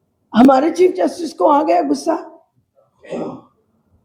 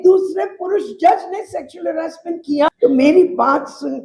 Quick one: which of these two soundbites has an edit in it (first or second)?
second